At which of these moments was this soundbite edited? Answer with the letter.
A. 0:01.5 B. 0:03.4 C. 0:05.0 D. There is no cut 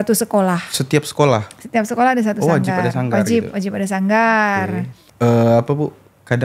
C